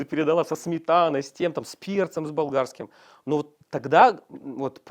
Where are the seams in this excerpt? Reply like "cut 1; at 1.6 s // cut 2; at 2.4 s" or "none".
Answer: none